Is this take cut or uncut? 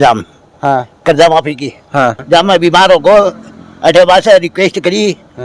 cut